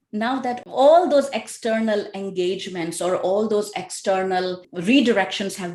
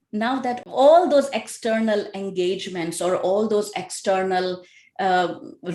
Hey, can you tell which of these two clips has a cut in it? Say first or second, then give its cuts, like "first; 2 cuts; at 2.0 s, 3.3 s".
first; 1 cut; at 4.7 s